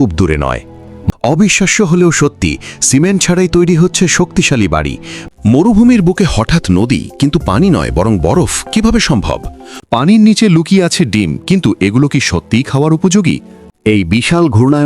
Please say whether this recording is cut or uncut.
cut